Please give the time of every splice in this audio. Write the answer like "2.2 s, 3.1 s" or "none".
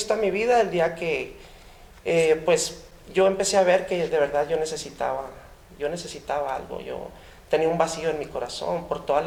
none